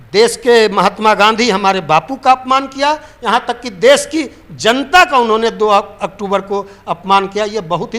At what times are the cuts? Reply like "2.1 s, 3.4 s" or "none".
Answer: none